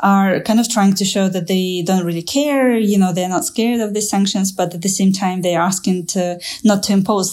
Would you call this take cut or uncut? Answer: uncut